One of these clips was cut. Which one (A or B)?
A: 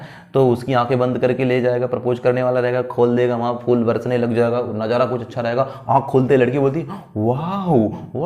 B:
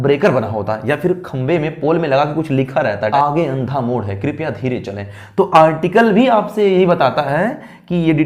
B